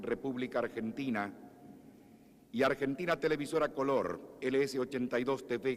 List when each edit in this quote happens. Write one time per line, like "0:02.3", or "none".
0:02.6